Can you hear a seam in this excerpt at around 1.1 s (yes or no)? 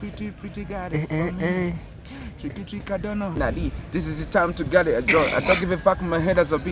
no